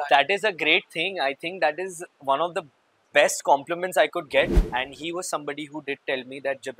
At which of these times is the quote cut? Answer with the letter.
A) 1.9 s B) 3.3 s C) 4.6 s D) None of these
C